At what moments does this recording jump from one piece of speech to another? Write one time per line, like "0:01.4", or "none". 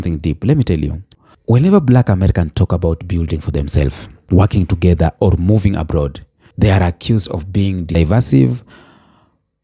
0:01.1
0:08.0